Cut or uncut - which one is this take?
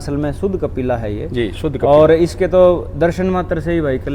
uncut